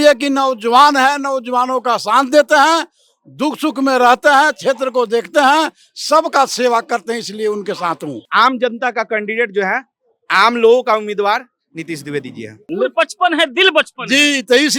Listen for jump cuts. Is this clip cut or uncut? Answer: cut